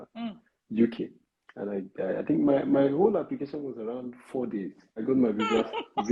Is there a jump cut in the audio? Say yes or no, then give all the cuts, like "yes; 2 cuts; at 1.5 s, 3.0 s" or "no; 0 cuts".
yes; 1 cut; at 5.0 s